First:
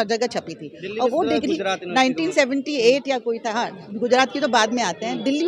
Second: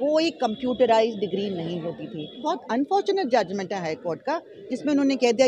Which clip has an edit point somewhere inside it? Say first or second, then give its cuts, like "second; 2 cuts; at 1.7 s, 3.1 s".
second; 1 cut; at 2.4 s